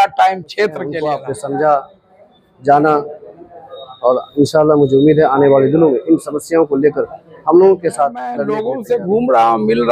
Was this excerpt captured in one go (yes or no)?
no